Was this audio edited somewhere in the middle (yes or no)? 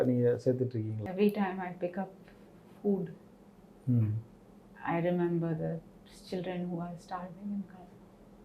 yes